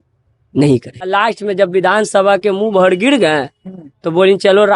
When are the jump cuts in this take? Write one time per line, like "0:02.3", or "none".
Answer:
0:01.1